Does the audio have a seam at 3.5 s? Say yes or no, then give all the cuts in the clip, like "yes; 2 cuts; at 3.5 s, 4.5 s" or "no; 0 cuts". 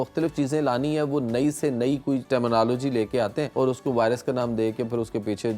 yes; 2 cuts; at 2.2 s, 3.5 s